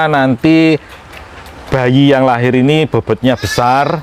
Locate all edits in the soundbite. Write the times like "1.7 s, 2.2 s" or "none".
none